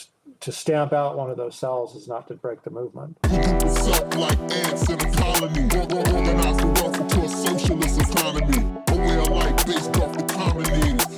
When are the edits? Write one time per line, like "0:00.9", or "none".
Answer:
0:03.2